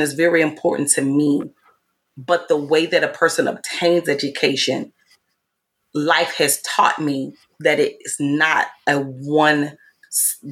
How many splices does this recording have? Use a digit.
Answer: 0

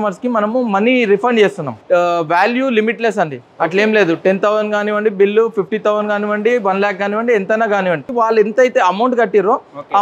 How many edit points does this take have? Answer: 2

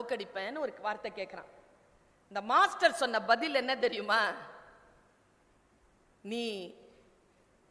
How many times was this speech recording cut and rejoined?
0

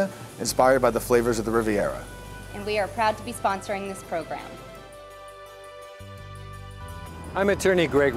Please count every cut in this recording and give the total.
1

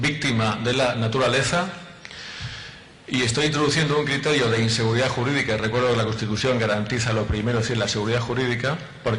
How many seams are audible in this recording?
0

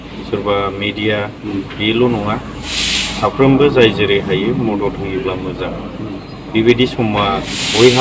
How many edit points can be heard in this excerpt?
0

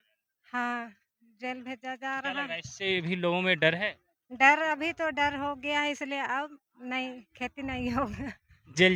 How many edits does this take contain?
0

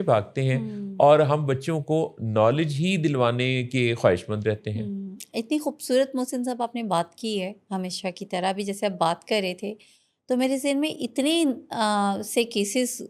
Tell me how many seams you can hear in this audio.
0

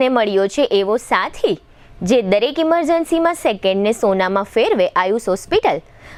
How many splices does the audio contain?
0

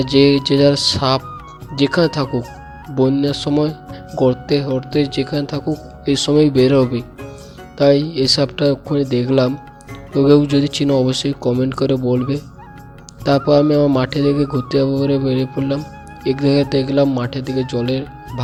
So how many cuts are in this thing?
0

